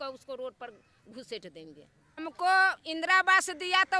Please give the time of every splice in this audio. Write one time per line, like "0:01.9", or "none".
0:02.2